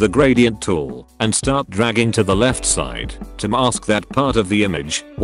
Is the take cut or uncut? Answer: uncut